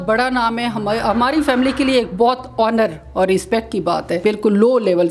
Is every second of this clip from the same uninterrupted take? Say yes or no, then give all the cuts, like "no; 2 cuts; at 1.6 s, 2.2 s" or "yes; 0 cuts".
no; 1 cut; at 4.2 s